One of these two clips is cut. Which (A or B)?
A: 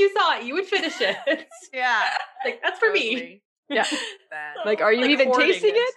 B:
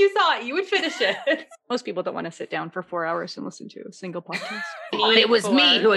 B